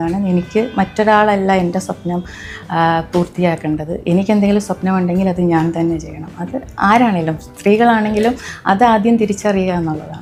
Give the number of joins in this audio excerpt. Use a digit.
0